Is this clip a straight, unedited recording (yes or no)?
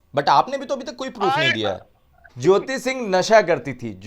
no